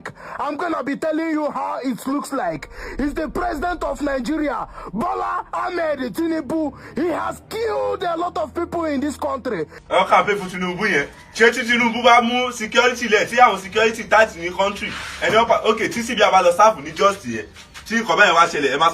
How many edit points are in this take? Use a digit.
1